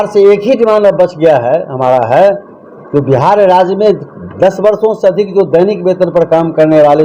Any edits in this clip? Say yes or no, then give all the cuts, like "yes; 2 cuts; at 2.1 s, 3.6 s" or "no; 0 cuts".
no; 0 cuts